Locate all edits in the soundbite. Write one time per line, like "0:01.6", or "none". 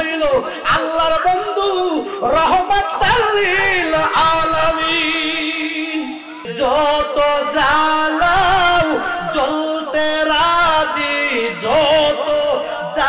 0:06.4

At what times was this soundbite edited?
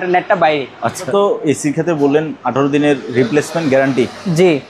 0:01.1

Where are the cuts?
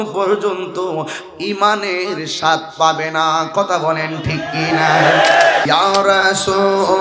0:05.6

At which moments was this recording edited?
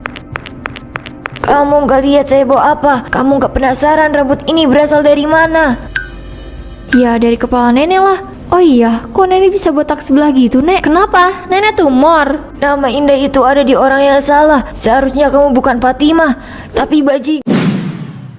0:17.4

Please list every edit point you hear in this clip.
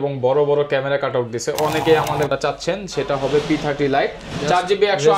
0:02.3

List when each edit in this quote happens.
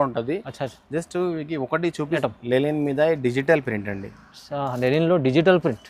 0:02.2

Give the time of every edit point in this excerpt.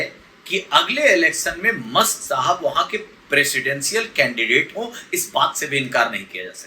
none

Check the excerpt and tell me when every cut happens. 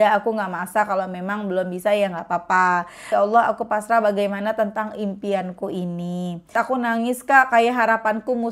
0:03.1
0:06.5

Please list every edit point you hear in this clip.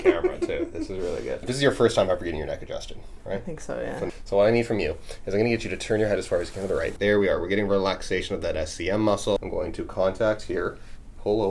0:01.5
0:04.1
0:07.0
0:09.5

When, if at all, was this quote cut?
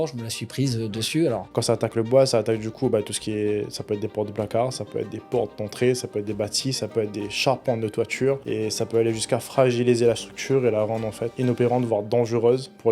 0:01.5
0:08.4
0:11.3

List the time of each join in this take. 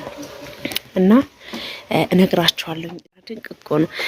0:02.8

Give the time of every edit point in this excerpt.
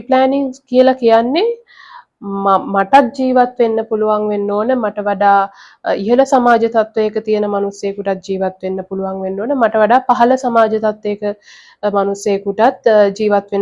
none

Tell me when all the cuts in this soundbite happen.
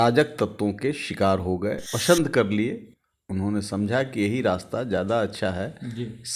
0:01.9

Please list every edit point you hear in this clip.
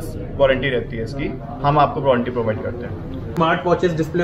0:03.3

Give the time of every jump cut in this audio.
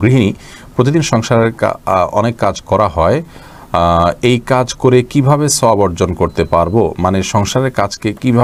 none

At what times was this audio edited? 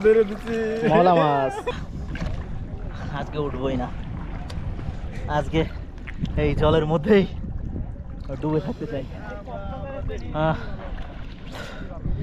0:01.7

